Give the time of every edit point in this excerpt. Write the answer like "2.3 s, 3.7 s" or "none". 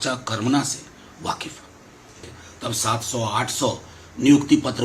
2.3 s